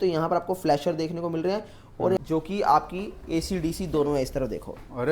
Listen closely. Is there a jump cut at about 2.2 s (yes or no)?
yes